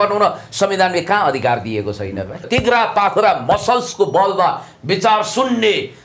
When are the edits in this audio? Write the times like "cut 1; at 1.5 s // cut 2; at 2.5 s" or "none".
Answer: cut 1; at 2.5 s